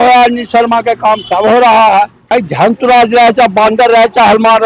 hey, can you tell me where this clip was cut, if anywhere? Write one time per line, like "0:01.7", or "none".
0:02.2